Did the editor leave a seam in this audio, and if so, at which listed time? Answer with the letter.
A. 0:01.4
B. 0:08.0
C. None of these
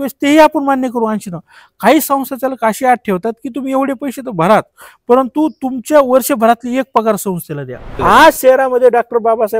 B